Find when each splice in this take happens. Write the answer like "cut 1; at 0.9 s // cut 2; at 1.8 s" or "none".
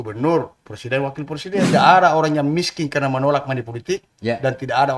cut 1; at 1.7 s

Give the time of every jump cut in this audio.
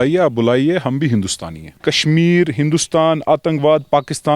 cut 1; at 1.8 s

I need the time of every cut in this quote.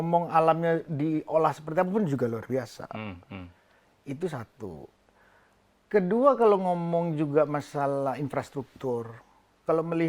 none

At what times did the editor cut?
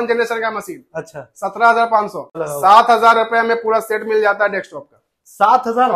cut 1; at 2.4 s

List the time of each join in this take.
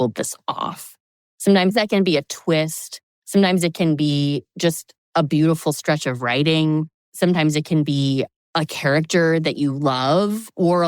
cut 1; at 4.9 s // cut 2; at 7.0 s // cut 3; at 8.4 s

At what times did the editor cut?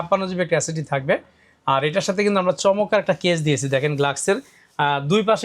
none

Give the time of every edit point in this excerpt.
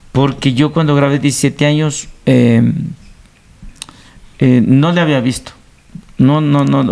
none

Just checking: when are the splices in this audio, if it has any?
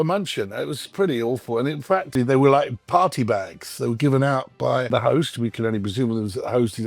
cut 1; at 2.1 s // cut 2; at 4.9 s

